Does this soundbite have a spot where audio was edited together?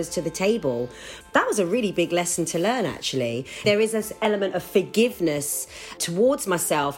yes; 3 cuts; at 1.1 s, 3.6 s, 6.0 s

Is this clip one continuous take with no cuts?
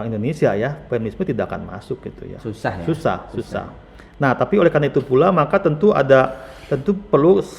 yes; 0 cuts

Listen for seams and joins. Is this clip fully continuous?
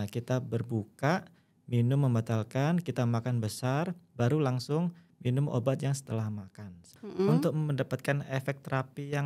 no; 1 cut; at 7.0 s

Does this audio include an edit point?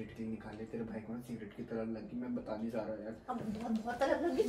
no; 0 cuts

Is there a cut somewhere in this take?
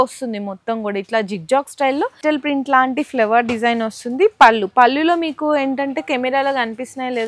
yes; 1 cut; at 2.2 s

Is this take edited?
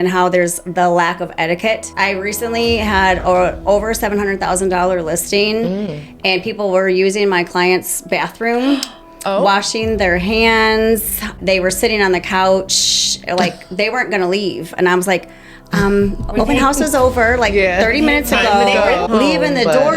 yes; 3 cuts; at 1.9 s, 11.4 s, 19.0 s

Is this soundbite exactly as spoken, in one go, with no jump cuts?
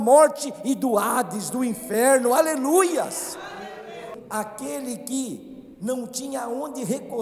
no; 1 cut; at 4.0 s

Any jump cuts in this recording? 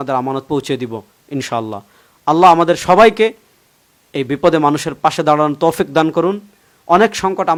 no; 0 cuts

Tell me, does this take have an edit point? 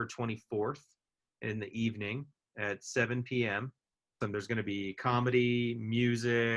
yes; 1 cut; at 4.2 s

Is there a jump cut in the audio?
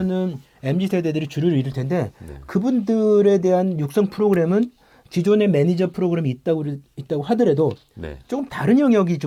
no; 0 cuts

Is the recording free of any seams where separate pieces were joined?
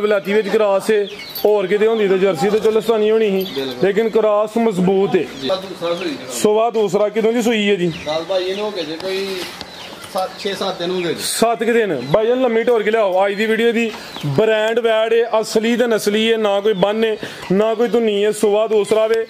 no; 1 cut; at 5.4 s

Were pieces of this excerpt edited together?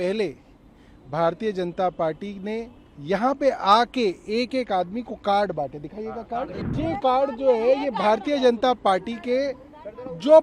yes; 1 cut; at 6.6 s

